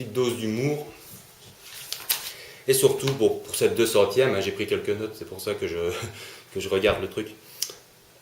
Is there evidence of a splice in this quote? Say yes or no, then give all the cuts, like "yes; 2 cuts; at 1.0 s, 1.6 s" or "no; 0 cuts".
yes; 1 cut; at 6.2 s